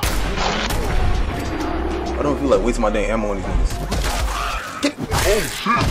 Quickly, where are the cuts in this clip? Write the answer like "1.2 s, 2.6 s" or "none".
none